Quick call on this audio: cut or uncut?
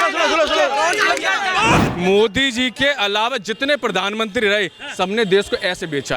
cut